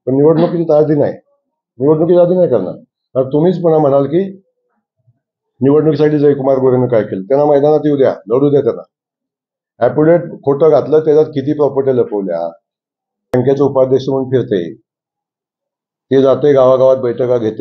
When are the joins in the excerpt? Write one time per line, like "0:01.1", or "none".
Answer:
0:13.3